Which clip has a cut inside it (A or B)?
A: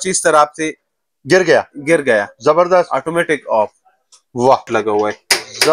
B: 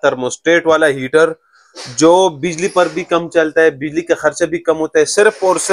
A